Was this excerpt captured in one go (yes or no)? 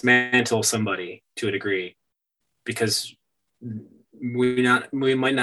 yes